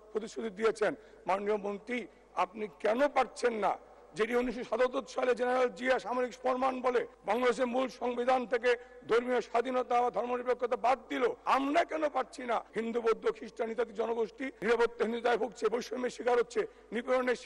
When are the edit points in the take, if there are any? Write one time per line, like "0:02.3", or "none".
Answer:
0:07.1
0:11.4
0:12.7
0:14.5